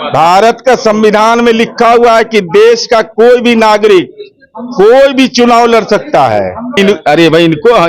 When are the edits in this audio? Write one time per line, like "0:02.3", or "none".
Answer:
0:06.8